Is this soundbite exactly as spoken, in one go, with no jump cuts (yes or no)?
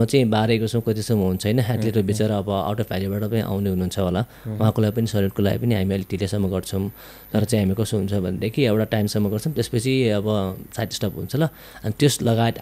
yes